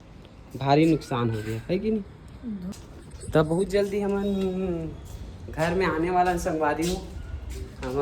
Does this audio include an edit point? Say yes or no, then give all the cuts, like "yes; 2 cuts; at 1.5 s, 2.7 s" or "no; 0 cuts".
yes; 1 cut; at 2.8 s